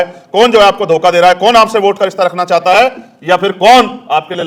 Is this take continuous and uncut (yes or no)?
yes